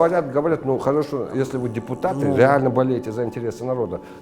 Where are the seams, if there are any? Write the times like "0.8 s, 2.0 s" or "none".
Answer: none